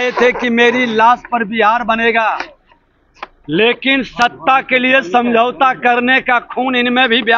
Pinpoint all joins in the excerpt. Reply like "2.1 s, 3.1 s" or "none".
none